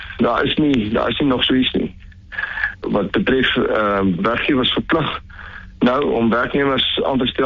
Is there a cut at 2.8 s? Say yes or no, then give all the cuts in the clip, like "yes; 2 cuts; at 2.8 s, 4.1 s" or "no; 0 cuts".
yes; 2 cuts; at 2.8 s, 4.2 s